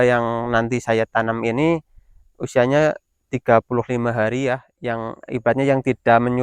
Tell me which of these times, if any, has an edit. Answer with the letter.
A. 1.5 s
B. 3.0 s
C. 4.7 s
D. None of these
C